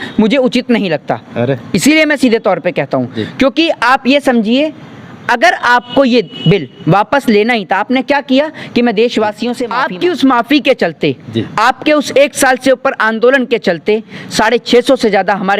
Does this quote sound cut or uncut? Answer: cut